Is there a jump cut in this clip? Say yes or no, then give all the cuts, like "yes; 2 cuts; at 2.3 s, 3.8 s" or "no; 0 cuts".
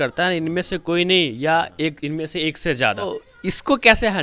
yes; 1 cut; at 3.2 s